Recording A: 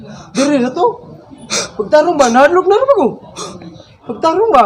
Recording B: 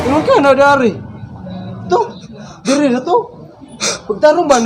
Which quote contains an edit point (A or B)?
B